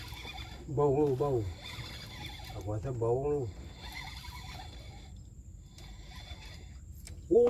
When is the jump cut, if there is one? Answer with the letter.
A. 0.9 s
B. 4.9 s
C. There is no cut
C